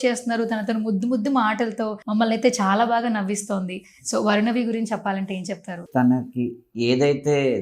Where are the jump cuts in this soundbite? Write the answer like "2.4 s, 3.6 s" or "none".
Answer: 2.0 s, 5.8 s